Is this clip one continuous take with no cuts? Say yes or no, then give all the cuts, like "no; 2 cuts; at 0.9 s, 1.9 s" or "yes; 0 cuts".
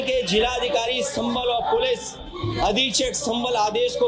yes; 0 cuts